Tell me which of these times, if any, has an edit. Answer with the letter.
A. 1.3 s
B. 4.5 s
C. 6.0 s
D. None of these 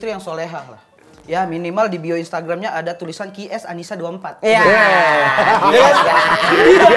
D